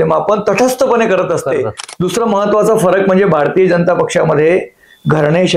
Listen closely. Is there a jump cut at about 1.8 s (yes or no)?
yes